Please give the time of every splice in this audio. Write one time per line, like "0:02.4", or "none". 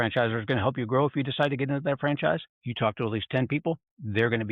0:02.6